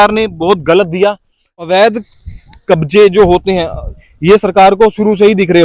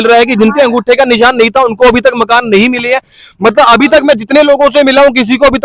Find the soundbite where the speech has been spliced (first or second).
first